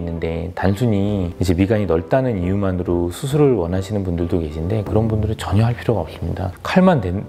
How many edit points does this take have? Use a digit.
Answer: 0